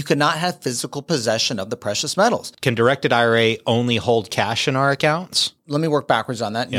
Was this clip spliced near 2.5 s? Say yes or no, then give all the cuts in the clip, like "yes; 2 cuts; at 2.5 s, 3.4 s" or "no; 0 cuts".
yes; 2 cuts; at 2.5 s, 5.6 s